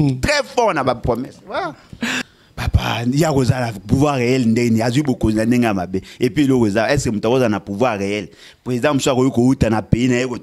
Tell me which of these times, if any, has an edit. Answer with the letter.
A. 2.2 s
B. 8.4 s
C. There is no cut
A